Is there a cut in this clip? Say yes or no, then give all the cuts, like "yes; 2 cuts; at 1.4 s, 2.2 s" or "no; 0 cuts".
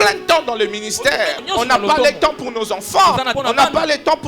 yes; 2 cuts; at 1.4 s, 3.3 s